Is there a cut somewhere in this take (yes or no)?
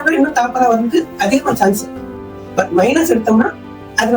no